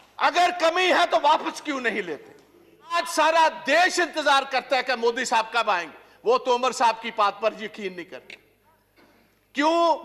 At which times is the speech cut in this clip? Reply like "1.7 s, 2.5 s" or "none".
3.0 s